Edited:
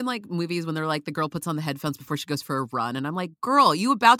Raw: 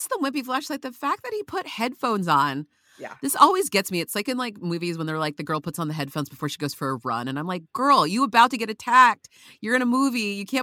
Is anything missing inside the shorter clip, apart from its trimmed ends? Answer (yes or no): no